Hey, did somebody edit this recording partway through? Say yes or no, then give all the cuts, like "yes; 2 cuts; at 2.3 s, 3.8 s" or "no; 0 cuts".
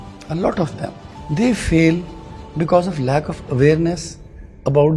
yes; 1 cut; at 1.1 s